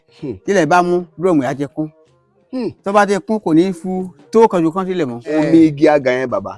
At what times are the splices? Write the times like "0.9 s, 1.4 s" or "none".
5.4 s